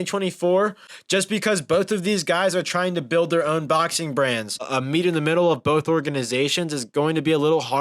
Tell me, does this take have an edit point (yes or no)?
yes